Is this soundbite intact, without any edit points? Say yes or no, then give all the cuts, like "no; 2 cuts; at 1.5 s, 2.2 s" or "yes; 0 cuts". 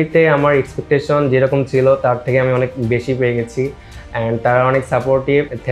yes; 0 cuts